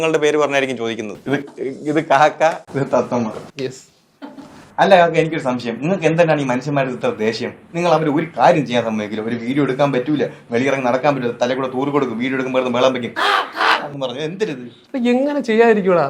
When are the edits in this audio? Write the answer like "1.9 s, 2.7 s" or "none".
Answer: 1.1 s

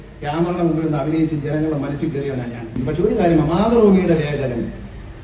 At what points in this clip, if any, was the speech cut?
2.8 s

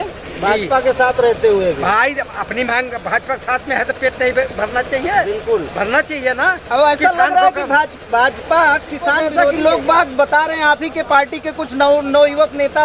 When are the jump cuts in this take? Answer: 9.2 s

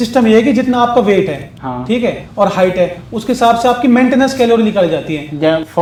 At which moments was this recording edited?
none

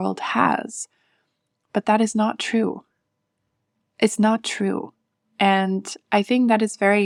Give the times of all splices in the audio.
none

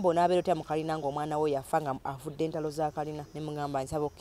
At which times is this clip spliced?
3.3 s

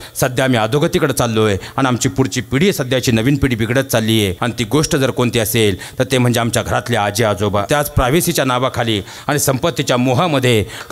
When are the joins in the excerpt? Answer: 4.4 s, 7.6 s

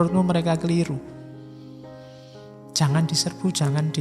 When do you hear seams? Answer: 1.0 s, 2.6 s

